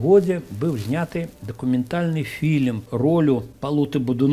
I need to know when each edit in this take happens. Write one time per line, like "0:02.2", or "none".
0:02.9